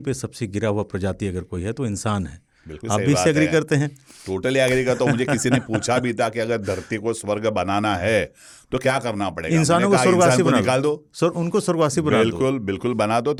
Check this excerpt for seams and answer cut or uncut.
uncut